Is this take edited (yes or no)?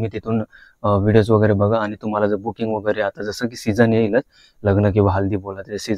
no